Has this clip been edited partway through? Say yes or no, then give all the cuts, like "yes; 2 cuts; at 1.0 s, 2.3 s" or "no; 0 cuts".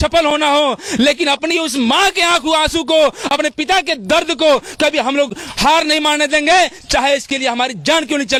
no; 0 cuts